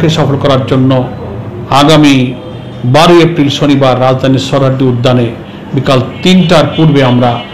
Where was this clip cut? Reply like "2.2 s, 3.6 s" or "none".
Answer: none